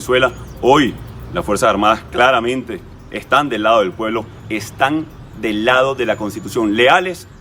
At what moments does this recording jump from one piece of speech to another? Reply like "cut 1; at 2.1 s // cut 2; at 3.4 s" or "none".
none